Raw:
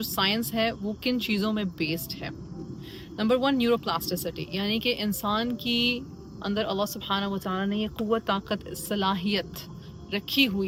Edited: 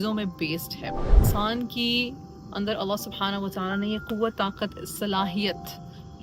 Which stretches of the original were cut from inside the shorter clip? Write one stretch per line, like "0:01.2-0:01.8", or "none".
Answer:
0:02.7-0:05.2